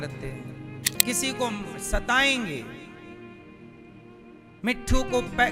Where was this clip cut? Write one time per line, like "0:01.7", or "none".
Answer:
0:01.0

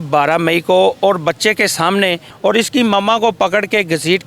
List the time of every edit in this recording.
0:02.3

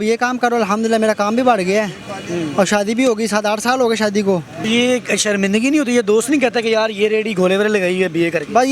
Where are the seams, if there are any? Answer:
0:04.7

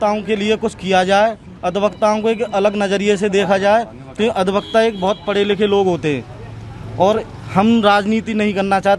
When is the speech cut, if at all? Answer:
none

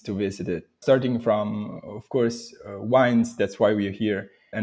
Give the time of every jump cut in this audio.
none

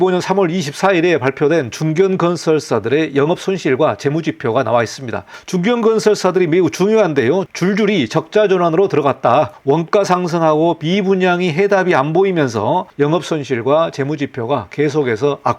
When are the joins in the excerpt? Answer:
0:09.6
0:12.9

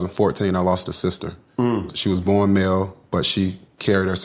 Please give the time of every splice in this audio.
0:01.9

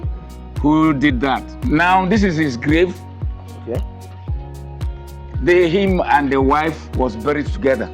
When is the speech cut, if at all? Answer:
0:01.5

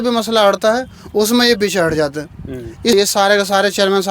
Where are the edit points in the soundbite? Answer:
0:02.9

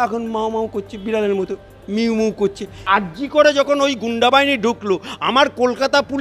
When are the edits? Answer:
0:02.8

